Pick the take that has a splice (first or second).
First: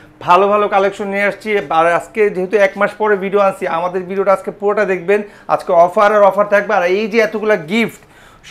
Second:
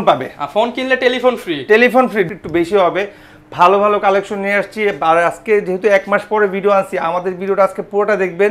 second